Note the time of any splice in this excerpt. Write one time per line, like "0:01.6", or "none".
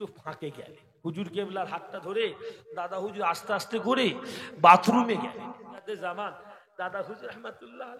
0:05.8

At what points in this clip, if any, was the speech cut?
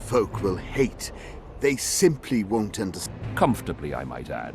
0:03.0

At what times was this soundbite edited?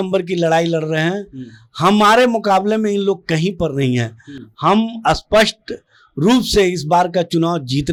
none

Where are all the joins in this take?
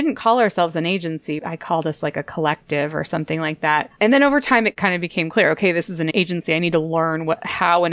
0:03.9
0:04.7
0:06.1

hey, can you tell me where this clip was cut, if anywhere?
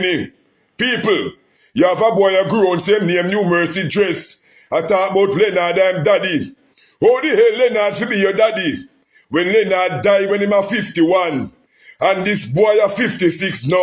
none

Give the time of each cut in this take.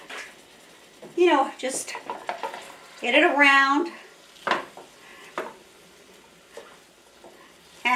none

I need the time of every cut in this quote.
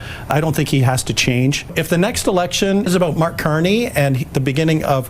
0:01.7
0:02.9

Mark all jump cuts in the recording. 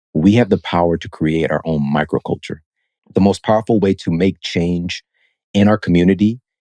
0:03.0

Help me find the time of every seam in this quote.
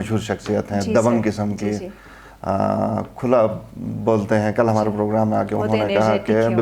none

